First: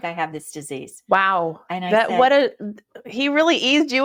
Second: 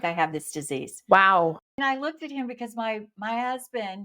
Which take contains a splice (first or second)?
second